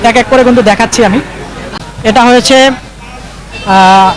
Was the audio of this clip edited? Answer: yes; 1 cut; at 1.7 s

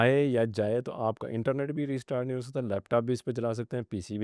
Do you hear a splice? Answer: no; 0 cuts

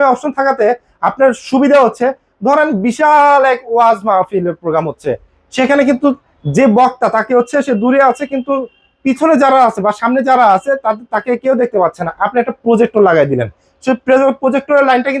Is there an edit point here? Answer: no; 0 cuts

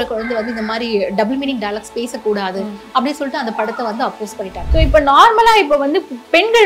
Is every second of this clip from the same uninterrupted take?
no; 1 cut; at 4.6 s

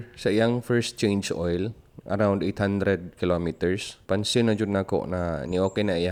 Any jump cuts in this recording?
no; 0 cuts

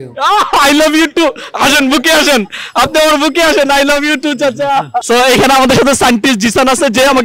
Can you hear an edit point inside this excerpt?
yes; 1 cut; at 5.0 s

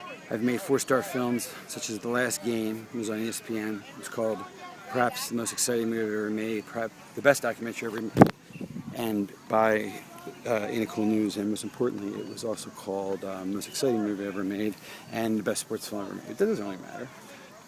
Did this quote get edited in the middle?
yes; 1 cut; at 11.2 s

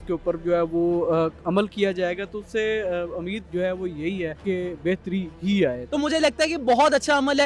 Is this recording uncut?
no; 3 cuts; at 3.4 s, 4.4 s, 5.8 s

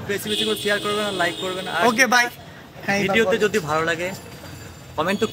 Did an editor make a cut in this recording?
no; 0 cuts

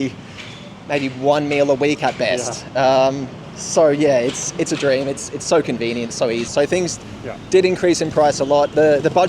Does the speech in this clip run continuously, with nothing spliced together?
no; 1 cut; at 6.5 s

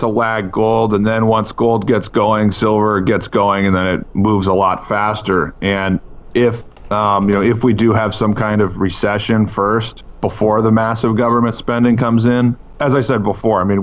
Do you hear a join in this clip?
yes; 3 cuts; at 6.7 s, 10.0 s, 12.7 s

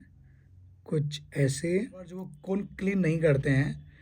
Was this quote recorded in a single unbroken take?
no; 1 cut; at 2.3 s

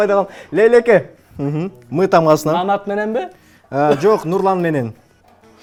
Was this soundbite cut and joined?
no; 0 cuts

